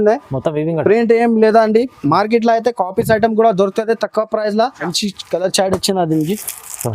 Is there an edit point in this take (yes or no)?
yes